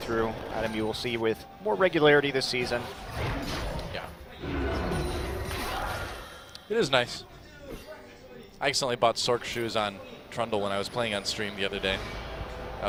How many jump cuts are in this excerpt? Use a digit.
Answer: 0